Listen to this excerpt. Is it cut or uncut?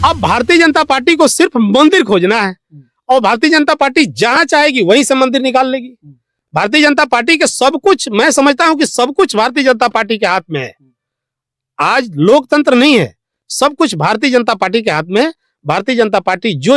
uncut